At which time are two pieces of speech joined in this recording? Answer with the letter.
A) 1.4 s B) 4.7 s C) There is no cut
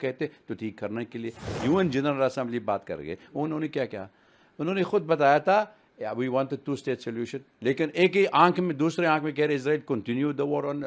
A